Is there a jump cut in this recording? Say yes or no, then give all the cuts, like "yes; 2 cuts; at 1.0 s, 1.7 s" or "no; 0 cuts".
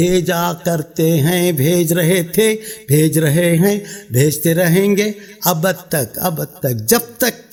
no; 0 cuts